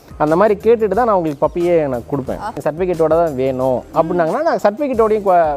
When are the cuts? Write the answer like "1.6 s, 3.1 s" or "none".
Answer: 2.6 s